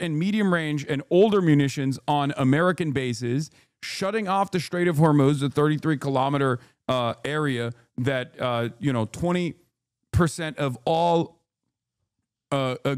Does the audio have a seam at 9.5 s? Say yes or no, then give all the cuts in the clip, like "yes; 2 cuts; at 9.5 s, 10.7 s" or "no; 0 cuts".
no; 0 cuts